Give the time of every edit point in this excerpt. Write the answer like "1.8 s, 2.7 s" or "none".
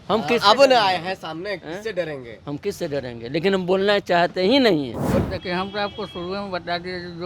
5.1 s